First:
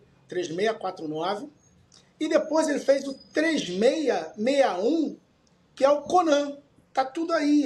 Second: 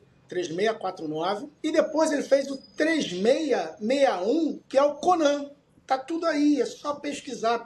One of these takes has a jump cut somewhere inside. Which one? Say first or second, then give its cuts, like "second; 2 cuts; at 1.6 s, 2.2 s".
second; 2 cuts; at 1.5 s, 4.6 s